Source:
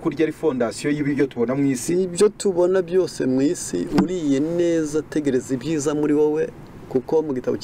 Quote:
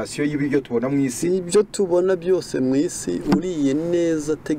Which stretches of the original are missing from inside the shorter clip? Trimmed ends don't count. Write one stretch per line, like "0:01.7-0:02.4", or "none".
none